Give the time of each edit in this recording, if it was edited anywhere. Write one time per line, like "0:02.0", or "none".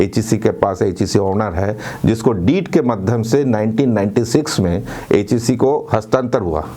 none